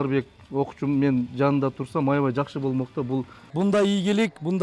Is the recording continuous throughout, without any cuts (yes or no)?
no